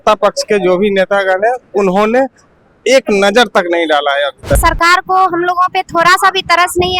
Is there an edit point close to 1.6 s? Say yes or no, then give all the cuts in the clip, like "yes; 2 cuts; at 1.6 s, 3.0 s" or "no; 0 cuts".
no; 1 cut; at 4.6 s